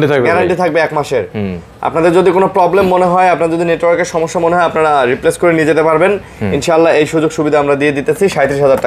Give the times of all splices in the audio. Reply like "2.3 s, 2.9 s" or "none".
none

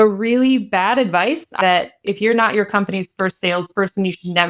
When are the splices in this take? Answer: 1.5 s

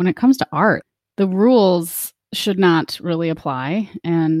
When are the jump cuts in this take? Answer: 1.0 s

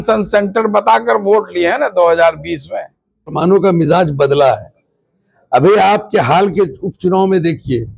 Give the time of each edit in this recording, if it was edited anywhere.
3.3 s

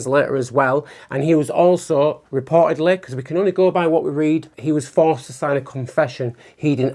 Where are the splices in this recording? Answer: 4.5 s

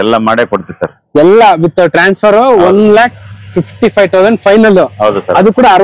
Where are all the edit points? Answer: none

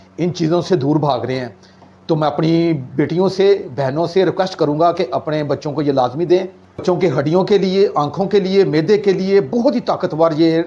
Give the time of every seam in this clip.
6.8 s

